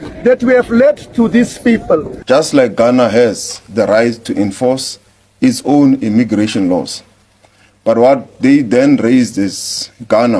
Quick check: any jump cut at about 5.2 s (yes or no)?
no